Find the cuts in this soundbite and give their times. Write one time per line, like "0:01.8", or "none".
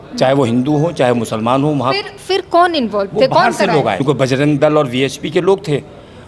0:04.0